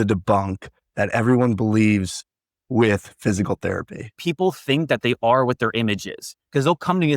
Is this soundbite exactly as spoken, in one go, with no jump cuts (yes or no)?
no